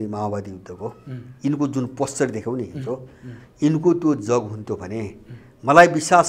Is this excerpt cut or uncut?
uncut